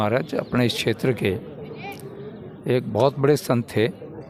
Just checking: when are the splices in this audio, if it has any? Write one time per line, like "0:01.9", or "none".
none

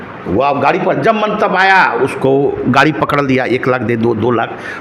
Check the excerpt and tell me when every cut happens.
none

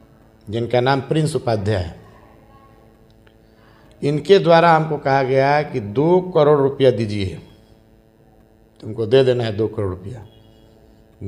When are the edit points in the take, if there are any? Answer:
none

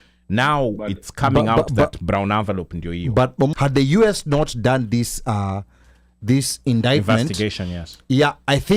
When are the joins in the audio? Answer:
0:03.5

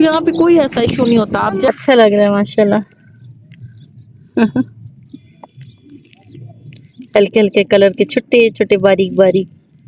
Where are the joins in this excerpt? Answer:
0:01.7

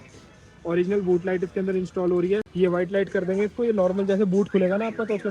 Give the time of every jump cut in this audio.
none

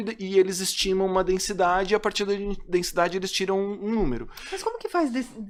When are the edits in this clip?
none

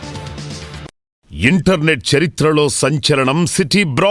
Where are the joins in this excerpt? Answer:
0:01.2

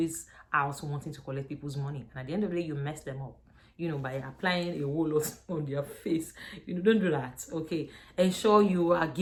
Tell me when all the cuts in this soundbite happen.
none

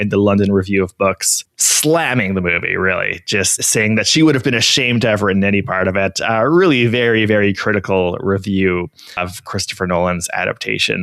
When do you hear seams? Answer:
none

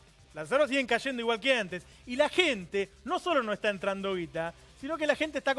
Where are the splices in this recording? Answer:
0:03.4

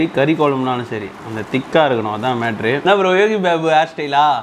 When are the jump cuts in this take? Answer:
0:02.8

